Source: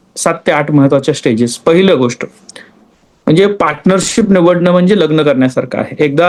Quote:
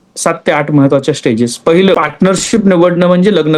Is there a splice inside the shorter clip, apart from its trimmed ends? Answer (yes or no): yes